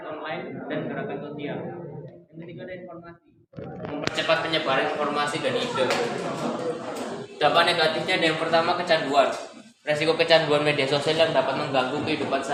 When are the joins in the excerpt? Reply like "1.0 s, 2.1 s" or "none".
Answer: none